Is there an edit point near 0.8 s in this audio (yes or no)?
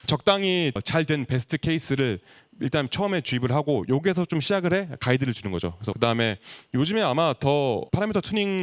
yes